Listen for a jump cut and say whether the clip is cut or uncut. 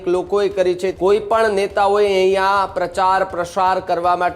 cut